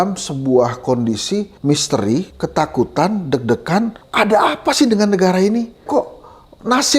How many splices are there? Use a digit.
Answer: 4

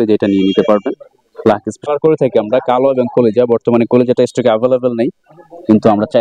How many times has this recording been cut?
1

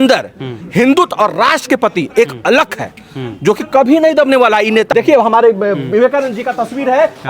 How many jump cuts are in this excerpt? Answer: 1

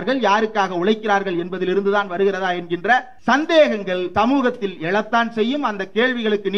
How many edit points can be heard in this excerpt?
2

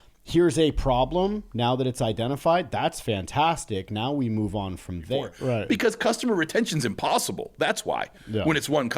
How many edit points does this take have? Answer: 1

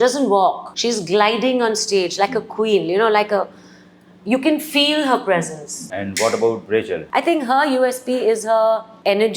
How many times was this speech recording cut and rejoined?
2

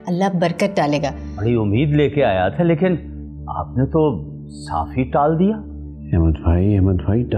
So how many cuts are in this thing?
1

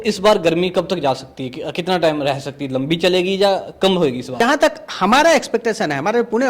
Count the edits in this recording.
1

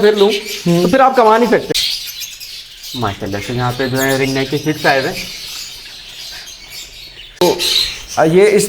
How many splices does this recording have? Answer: 2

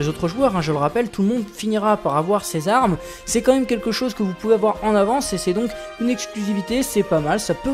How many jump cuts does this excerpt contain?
1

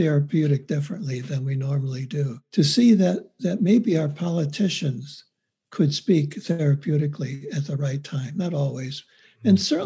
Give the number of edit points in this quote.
1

